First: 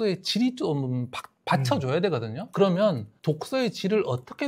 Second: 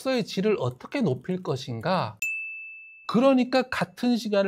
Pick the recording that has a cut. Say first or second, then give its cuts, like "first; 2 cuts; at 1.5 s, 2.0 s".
second; 1 cut; at 2.5 s